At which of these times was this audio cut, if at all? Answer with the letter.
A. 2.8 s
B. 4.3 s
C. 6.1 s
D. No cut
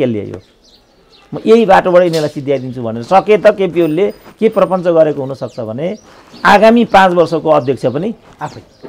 D